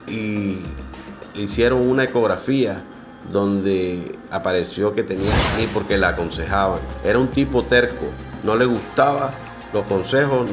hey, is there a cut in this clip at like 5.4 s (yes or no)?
yes